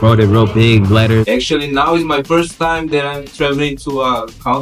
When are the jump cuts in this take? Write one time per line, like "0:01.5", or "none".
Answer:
0:01.3